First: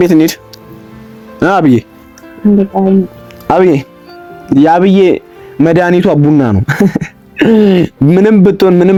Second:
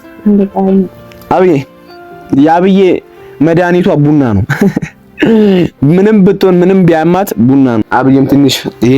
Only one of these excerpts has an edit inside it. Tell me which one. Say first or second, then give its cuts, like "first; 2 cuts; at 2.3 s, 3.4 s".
second; 1 cut; at 7.9 s